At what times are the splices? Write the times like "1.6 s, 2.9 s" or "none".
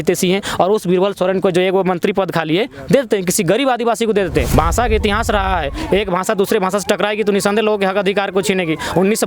4.5 s